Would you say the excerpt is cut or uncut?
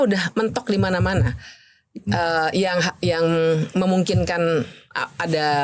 uncut